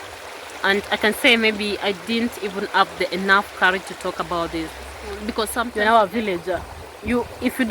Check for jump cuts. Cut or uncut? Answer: cut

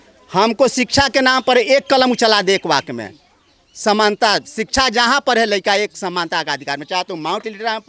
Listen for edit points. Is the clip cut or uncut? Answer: uncut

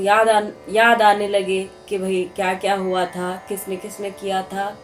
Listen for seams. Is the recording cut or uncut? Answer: uncut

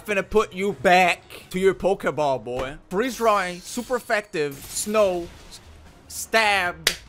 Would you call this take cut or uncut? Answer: cut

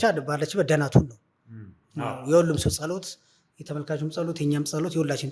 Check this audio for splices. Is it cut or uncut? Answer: uncut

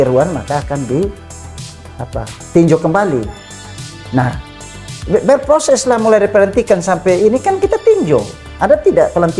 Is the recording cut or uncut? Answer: uncut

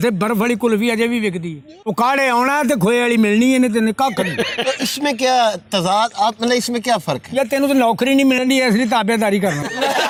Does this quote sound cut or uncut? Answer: uncut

